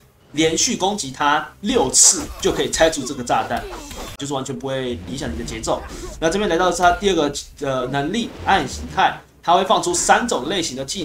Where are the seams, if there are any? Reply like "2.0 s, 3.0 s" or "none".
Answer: 4.2 s